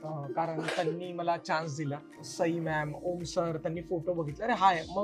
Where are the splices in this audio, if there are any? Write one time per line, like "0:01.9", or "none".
0:02.3